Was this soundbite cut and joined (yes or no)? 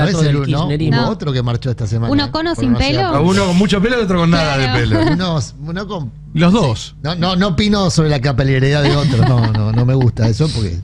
no